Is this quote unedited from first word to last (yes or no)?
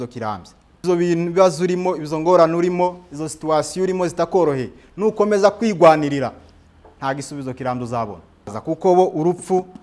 no